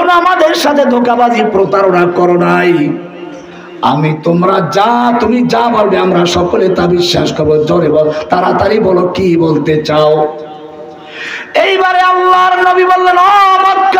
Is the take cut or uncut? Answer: uncut